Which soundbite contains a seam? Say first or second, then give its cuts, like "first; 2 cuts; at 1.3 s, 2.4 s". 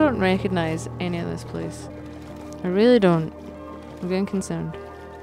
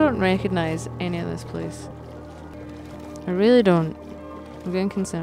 first; 1 cut; at 1.9 s